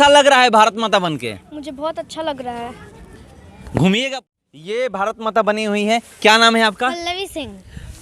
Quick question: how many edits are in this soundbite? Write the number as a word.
one